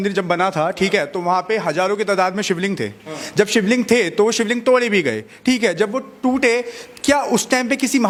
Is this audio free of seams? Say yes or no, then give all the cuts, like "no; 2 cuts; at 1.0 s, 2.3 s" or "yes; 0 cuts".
yes; 0 cuts